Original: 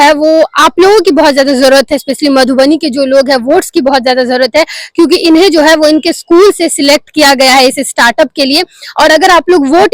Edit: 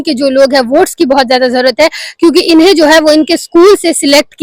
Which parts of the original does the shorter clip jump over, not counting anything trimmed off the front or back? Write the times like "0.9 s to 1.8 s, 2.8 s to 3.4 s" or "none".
none